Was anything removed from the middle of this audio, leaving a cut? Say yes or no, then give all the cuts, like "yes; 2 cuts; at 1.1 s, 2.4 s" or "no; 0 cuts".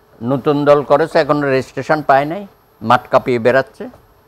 no; 0 cuts